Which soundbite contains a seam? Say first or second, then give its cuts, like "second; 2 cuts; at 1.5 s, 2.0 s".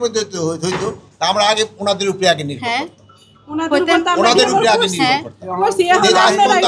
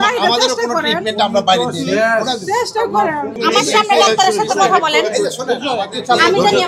second; 1 cut; at 3.4 s